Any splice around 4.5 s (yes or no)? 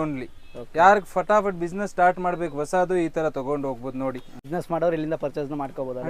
yes